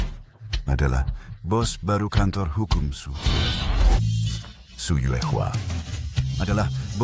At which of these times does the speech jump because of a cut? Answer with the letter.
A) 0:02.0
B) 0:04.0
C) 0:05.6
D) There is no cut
B